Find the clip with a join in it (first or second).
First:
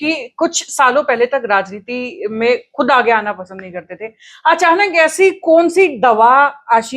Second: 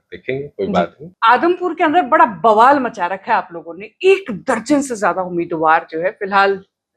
second